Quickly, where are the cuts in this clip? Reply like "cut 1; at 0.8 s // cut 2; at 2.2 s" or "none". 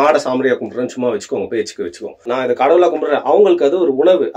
cut 1; at 2.3 s